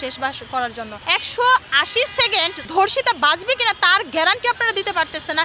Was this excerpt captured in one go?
no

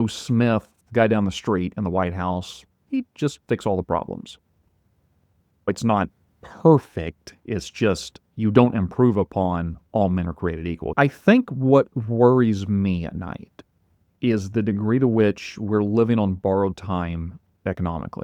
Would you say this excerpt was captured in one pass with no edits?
no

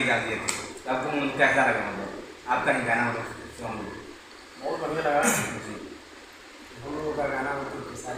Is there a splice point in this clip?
no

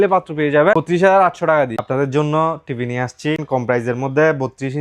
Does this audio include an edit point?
yes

